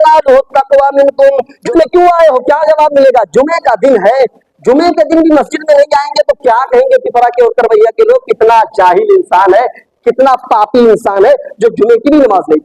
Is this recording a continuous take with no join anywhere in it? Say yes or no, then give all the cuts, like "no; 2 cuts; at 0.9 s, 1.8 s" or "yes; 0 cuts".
no; 1 cut; at 1.6 s